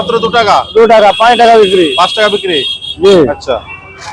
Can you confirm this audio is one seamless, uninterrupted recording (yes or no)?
yes